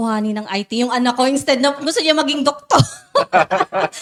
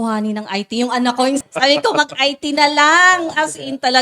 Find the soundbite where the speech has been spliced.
second; 1 cut; at 1.4 s

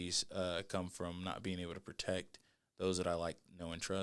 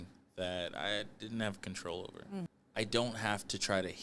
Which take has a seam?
second; 1 cut; at 2.5 s

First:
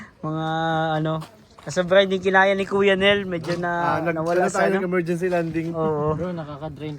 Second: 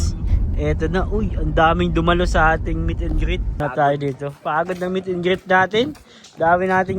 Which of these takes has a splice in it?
second; 1 cut; at 3.6 s

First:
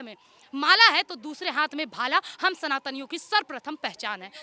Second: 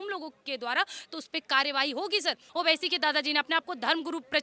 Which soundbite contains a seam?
second; 1 cut; at 2.4 s

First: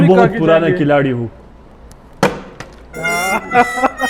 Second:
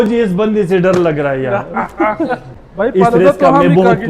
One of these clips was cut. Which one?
second; 1 cut; at 2.6 s

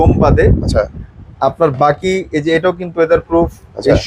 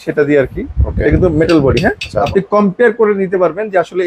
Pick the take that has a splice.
second; 1 cut; at 2.3 s

